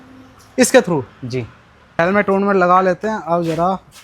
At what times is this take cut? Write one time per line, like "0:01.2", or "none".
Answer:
0:02.0